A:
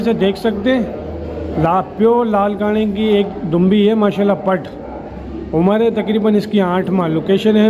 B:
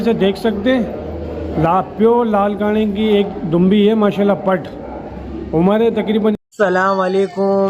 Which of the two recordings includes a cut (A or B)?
B